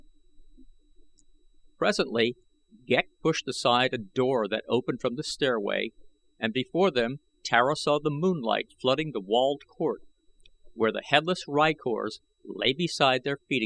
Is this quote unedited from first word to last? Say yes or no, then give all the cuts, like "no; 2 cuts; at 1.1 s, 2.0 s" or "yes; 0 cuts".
yes; 0 cuts